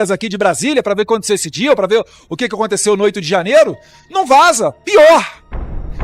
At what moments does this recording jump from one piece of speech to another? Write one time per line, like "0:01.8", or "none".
0:04.8